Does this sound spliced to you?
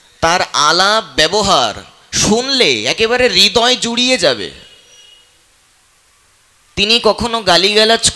no; 0 cuts

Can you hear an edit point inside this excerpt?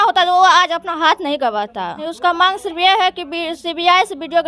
yes; 1 cut; at 2.0 s

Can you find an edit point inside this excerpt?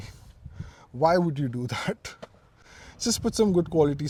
no; 0 cuts

